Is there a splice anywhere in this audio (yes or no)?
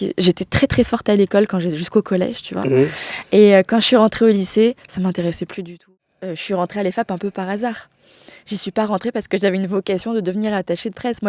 yes